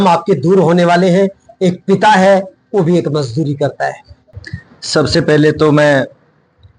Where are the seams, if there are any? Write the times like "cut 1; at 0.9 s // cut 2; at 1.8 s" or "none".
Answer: cut 1; at 4.1 s